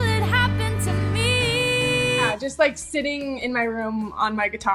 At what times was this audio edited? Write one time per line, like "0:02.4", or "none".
0:02.3